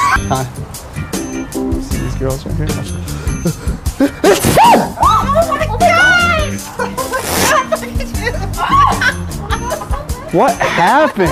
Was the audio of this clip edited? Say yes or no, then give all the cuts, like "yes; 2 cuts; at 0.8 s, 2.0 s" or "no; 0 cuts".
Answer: yes; 1 cut; at 9.5 s